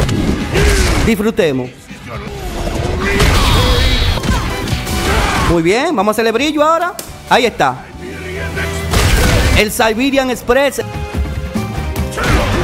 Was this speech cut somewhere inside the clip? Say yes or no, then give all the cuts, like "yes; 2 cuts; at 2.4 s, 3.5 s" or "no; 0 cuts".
yes; 3 cuts; at 2.2 s, 4.2 s, 10.8 s